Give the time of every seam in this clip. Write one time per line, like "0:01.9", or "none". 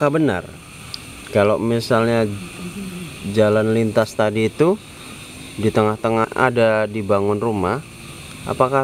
0:06.3